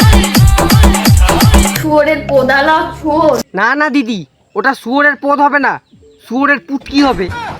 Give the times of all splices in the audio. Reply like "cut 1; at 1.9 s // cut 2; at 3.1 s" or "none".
cut 1; at 1.8 s